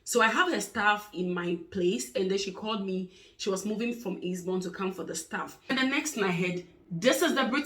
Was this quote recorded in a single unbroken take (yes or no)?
no